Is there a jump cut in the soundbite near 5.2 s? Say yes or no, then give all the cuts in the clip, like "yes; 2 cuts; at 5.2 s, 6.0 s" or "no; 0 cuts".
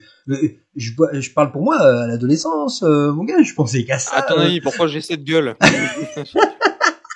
no; 0 cuts